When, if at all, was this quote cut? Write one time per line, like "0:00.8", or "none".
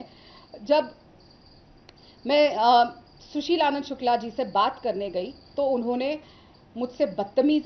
none